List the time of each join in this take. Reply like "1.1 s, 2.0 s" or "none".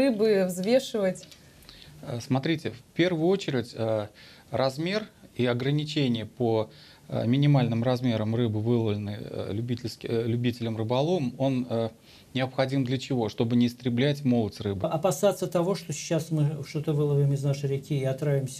14.9 s